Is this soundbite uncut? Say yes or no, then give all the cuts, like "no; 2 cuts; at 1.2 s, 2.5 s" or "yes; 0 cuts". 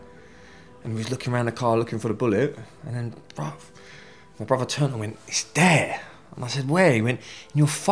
yes; 0 cuts